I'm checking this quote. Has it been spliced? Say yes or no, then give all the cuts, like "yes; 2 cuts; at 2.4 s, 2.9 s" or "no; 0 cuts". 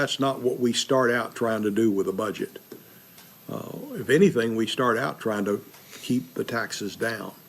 yes; 1 cut; at 3.3 s